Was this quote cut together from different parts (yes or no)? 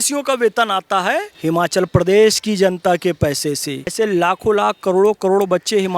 yes